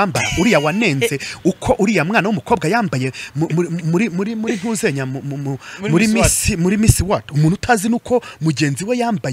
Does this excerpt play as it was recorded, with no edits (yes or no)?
yes